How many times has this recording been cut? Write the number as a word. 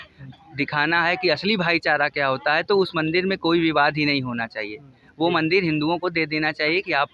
zero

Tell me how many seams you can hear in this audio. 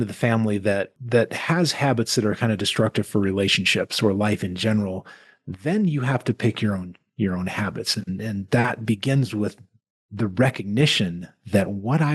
one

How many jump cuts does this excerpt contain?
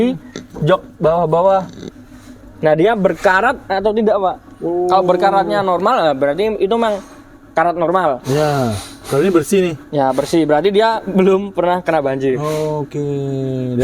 zero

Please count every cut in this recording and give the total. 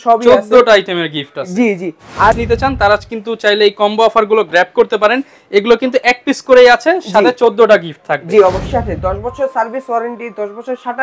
two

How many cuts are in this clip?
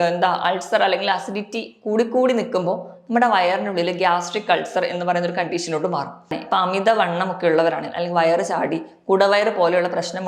one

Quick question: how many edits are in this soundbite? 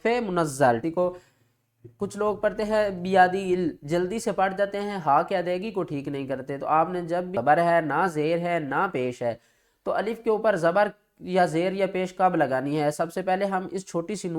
three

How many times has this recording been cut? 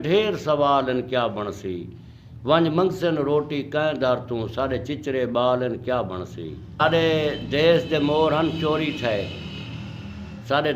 one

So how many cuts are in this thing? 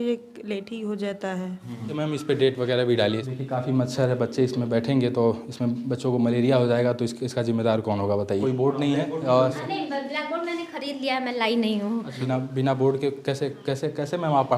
four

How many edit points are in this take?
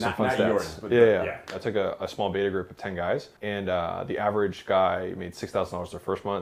two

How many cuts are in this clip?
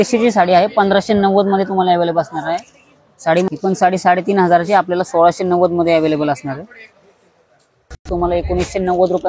two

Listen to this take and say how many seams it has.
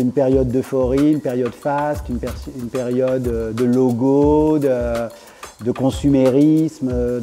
zero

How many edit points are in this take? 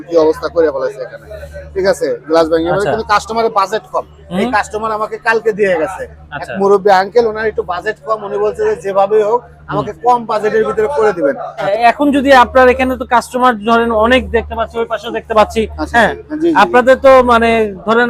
one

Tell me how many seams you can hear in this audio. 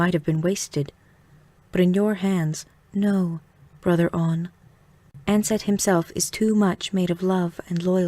one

